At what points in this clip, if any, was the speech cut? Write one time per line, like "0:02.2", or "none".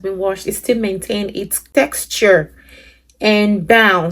0:01.5

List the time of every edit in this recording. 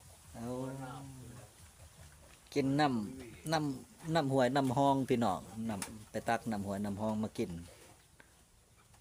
none

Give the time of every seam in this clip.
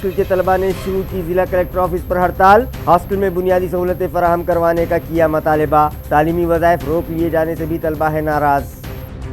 none

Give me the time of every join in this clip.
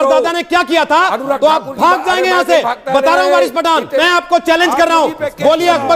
0:04.0

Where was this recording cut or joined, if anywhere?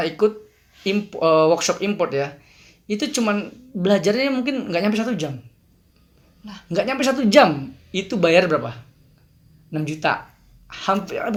none

